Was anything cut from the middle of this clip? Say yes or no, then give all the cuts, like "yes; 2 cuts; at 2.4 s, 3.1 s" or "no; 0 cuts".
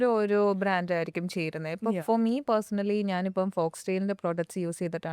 no; 0 cuts